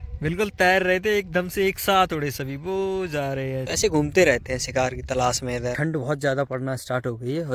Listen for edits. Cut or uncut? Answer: cut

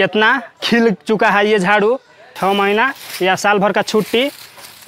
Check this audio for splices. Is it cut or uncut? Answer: cut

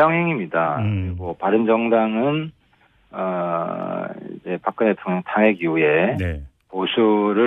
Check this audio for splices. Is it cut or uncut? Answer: uncut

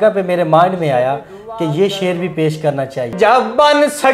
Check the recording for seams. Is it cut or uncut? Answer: cut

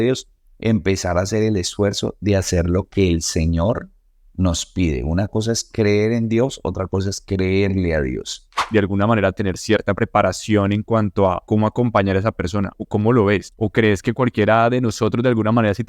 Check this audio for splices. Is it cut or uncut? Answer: cut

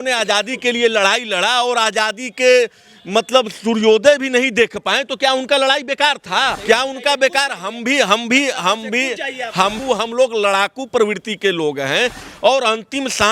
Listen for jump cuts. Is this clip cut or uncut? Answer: cut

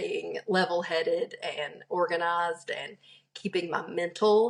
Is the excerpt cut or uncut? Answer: uncut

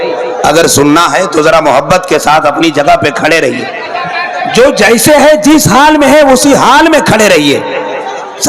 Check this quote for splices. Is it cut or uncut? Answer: uncut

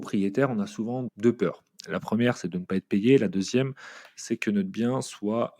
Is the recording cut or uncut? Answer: cut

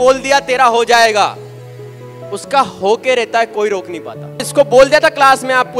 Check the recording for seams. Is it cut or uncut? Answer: cut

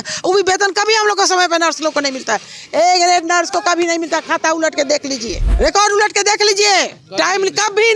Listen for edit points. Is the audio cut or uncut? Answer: cut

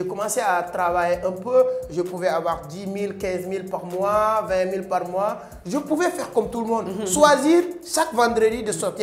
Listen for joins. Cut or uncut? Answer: uncut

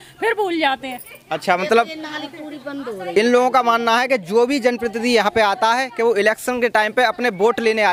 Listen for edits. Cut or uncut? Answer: uncut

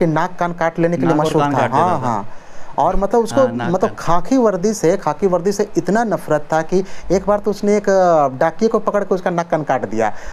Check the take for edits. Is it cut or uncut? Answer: uncut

